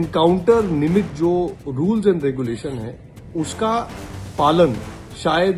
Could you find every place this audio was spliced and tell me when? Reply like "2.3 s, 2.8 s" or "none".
none